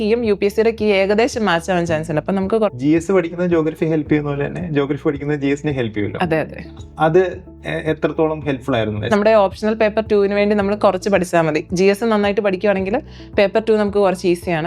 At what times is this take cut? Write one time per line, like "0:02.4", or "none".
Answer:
0:02.8
0:09.1